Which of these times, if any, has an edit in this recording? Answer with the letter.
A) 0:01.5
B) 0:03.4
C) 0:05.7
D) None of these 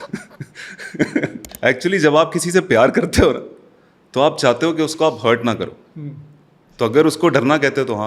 A